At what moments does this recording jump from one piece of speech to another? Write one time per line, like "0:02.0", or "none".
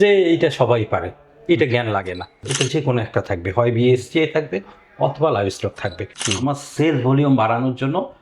0:02.4
0:06.2